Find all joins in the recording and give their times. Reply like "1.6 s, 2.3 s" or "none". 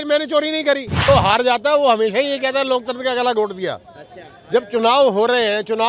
0.9 s